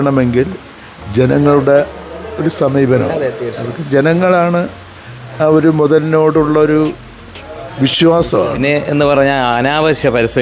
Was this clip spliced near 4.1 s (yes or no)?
no